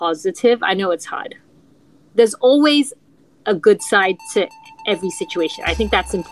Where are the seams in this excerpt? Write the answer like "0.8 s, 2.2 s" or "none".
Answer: none